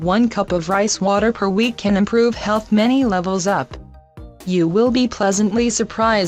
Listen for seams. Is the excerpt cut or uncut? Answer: cut